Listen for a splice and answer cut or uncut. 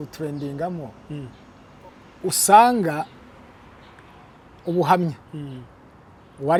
uncut